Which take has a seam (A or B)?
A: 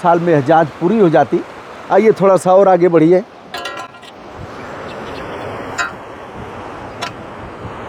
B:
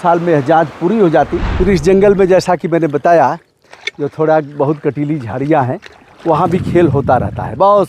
B